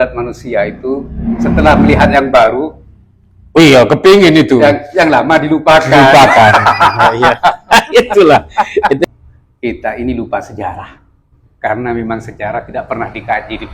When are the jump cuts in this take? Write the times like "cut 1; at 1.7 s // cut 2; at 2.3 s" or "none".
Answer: cut 1; at 9.0 s